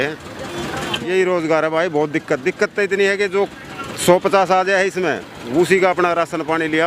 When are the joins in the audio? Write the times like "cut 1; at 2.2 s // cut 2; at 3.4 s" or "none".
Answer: cut 1; at 0.9 s